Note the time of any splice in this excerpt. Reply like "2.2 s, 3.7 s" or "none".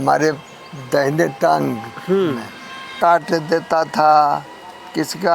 3.0 s